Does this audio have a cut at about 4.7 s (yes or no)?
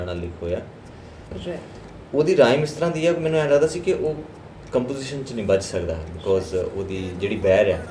no